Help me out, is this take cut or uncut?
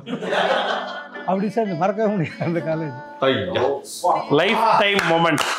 cut